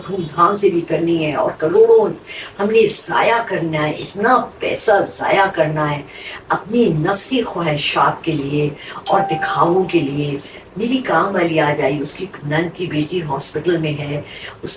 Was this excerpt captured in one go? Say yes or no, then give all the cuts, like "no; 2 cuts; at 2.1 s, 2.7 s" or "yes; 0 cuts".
yes; 0 cuts